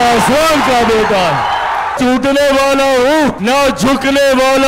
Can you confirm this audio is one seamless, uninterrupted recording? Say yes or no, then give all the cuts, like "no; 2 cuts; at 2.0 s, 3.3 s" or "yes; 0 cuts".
no; 2 cuts; at 2.0 s, 3.4 s